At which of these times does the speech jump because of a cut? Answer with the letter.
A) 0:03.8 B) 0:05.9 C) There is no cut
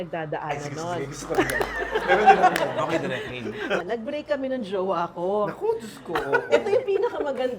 A